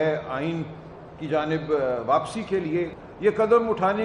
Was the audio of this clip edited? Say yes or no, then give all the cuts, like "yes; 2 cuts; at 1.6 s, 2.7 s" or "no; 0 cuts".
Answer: yes; 1 cut; at 2.9 s